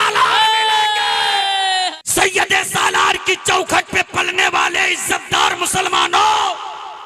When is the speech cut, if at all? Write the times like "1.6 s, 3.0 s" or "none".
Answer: 2.0 s

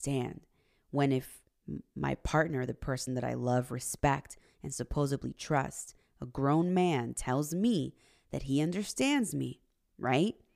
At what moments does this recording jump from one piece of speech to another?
none

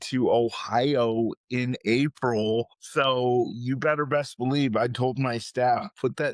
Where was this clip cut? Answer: 2.8 s

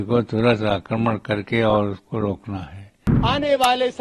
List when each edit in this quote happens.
3.1 s

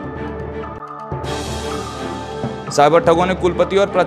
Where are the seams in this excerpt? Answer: 2.6 s

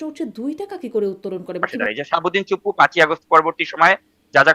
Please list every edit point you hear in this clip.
1.8 s

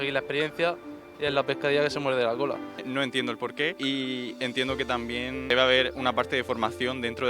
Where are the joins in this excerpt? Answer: 2.7 s, 3.8 s, 5.5 s

